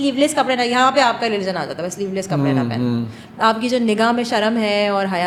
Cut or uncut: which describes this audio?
uncut